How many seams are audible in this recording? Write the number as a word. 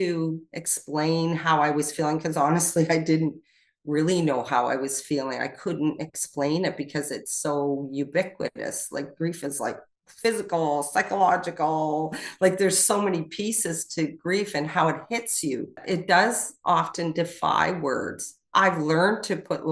one